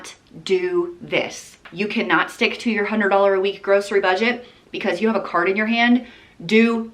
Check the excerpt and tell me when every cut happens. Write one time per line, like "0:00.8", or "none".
0:01.6